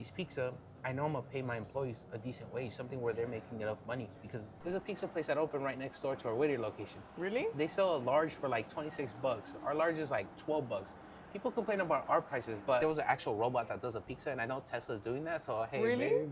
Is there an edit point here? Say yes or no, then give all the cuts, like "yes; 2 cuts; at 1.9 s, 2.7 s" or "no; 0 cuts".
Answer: yes; 2 cuts; at 4.5 s, 12.8 s